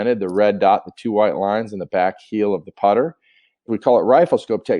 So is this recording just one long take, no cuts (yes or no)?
no